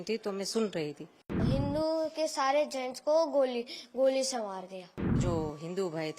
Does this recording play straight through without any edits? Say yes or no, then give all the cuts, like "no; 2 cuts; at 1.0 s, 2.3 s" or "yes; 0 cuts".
no; 2 cuts; at 1.4 s, 5.2 s